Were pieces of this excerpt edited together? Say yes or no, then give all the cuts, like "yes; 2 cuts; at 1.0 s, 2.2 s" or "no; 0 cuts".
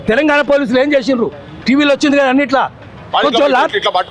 no; 0 cuts